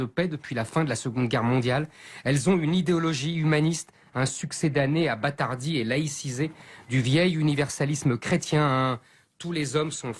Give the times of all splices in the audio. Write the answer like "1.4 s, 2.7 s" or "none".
none